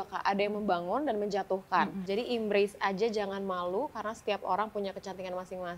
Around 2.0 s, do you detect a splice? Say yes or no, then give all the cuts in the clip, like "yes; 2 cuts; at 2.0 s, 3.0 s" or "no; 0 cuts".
yes; 1 cut; at 2.0 s